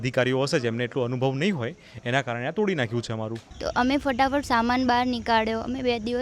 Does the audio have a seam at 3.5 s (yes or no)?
yes